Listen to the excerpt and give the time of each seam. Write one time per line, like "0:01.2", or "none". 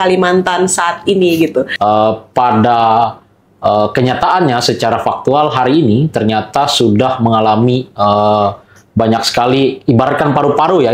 0:01.7

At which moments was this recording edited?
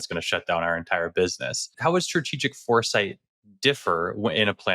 0:01.7

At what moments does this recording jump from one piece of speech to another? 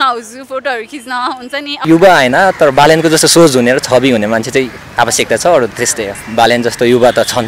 0:01.8
0:06.2

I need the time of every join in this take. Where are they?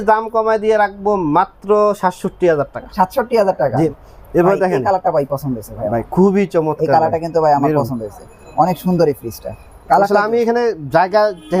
0:03.9

